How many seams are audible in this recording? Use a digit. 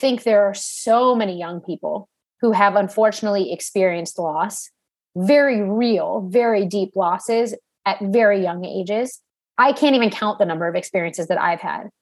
1